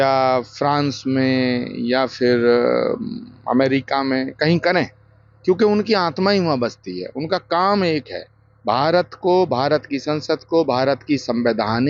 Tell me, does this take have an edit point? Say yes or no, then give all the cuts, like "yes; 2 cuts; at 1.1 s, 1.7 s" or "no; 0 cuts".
no; 0 cuts